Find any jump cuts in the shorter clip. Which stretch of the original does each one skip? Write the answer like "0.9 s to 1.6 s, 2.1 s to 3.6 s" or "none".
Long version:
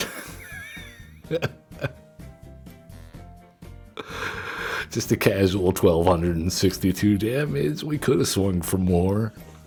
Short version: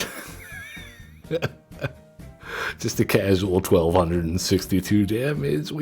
2.4 s to 4.6 s